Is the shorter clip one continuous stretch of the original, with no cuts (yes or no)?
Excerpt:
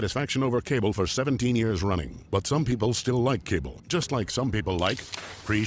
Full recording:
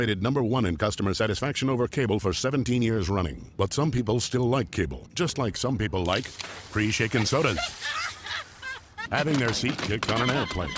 yes